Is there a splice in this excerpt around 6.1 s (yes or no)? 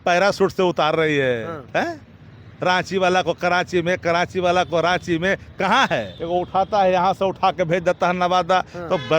yes